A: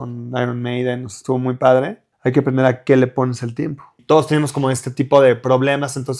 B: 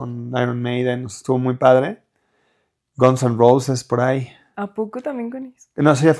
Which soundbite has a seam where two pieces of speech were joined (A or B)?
A